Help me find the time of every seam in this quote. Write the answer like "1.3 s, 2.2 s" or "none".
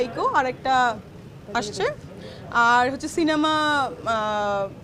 none